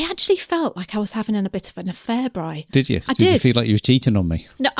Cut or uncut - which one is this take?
uncut